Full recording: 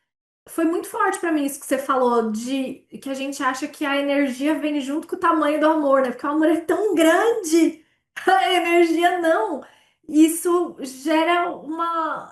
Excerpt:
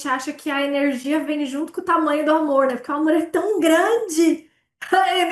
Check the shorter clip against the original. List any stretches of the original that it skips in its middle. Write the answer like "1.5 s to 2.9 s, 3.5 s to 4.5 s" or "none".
none